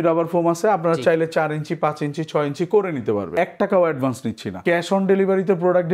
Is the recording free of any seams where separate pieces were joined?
no; 2 cuts; at 3.3 s, 4.6 s

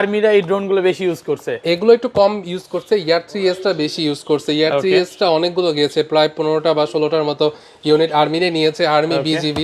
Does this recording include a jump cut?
no; 0 cuts

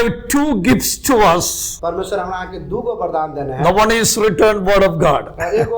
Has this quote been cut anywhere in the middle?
yes; 1 cut; at 1.6 s

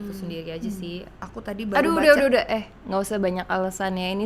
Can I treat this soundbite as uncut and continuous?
no; 1 cut; at 1.2 s

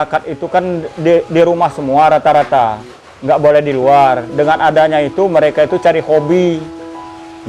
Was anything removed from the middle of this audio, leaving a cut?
no; 0 cuts

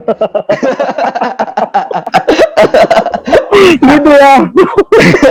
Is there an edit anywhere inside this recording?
no; 0 cuts

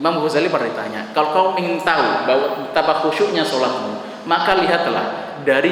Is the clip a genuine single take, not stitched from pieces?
yes; 0 cuts

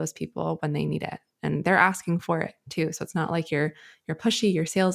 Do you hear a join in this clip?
no; 0 cuts

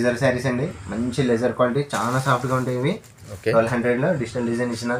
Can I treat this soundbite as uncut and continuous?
yes; 0 cuts

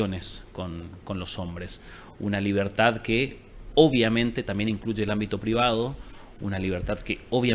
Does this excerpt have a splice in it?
no; 0 cuts

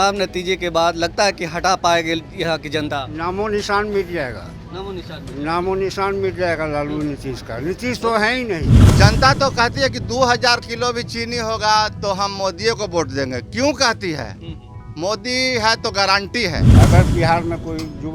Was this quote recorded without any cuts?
no; 2 cuts; at 8.8 s, 16.8 s

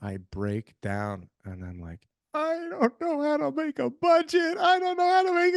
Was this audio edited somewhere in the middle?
no; 0 cuts

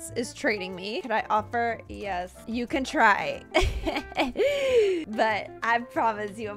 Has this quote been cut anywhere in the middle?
yes; 3 cuts; at 1.0 s, 2.4 s, 5.1 s

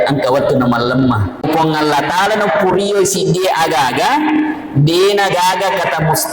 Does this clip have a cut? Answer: yes; 1 cut; at 1.4 s

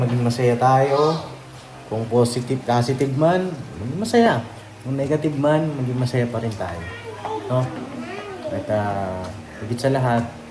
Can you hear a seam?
no; 0 cuts

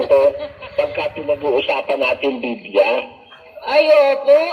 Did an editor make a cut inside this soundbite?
yes; 1 cut; at 0.9 s

